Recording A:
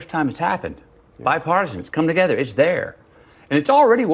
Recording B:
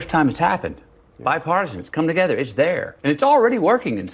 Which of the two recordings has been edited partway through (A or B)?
B